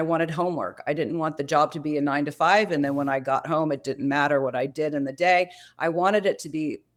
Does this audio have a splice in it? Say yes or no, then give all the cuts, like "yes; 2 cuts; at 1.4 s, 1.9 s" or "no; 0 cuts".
no; 0 cuts